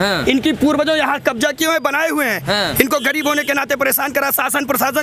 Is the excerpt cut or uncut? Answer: uncut